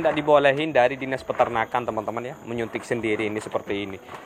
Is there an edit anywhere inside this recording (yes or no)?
no